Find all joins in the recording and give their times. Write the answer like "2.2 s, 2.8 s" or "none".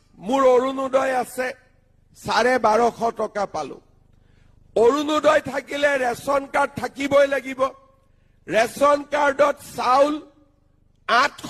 none